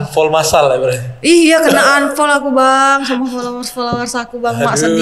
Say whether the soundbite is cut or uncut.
uncut